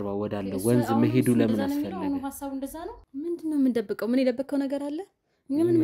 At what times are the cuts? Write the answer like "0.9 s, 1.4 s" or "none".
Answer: 3.0 s